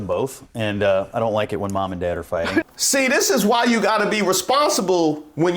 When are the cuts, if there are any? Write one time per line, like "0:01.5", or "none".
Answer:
0:02.7